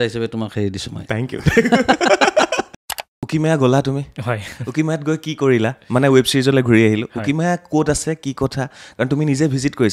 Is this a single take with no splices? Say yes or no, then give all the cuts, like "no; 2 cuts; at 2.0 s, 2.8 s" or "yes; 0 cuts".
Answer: no; 1 cut; at 3.1 s